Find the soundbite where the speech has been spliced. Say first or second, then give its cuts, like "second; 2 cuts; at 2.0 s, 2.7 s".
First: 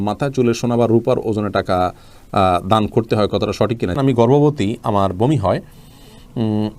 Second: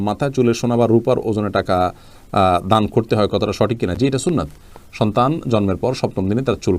first; 1 cut; at 3.9 s